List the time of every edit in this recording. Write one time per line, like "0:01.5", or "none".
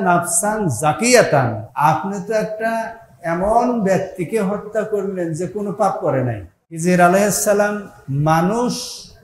0:01.6
0:06.5